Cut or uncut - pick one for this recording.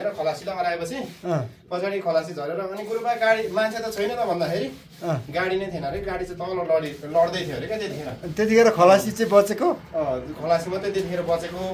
uncut